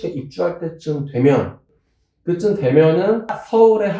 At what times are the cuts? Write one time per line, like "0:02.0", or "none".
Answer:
0:01.7